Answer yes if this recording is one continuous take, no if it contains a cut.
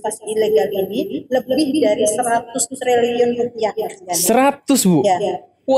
yes